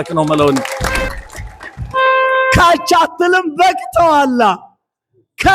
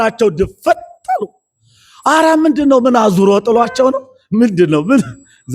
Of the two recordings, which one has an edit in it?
first; 1 cut; at 1.0 s

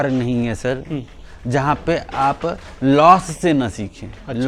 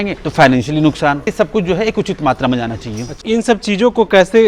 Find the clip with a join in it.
second; 2 cuts; at 1.3 s, 3.2 s

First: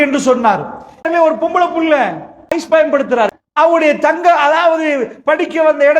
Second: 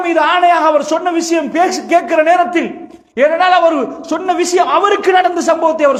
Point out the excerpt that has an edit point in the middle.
first; 3 cuts; at 1.1 s, 2.6 s, 3.4 s

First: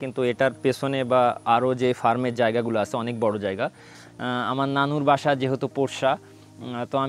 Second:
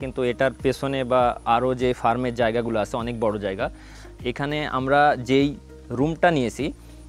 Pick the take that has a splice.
first; 1 cut; at 4.0 s

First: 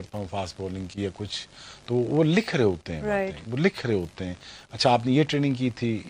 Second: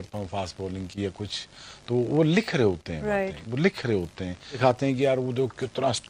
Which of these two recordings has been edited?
second; 1 cut; at 4.6 s

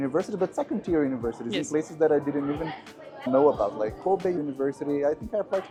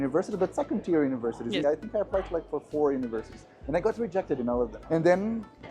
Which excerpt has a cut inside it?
second; 2 cuts; at 1.6 s, 4.8 s

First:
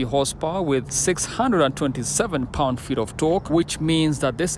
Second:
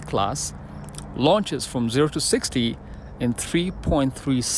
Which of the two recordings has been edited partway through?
first; 2 cuts; at 0.9 s, 3.5 s

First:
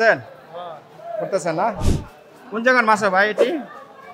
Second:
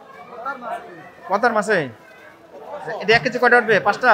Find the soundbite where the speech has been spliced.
first; 1 cut; at 1.9 s

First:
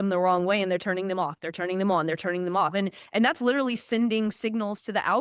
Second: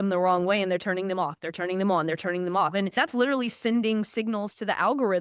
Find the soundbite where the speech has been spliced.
second; 1 cut; at 3.0 s

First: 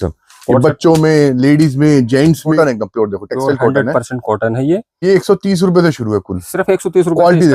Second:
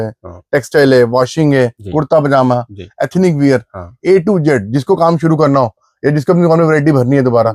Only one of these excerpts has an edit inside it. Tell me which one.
first; 2 cuts; at 2.6 s, 5.0 s

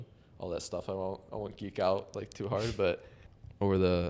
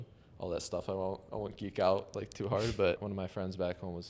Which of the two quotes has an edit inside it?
second; 1 cut; at 3.0 s

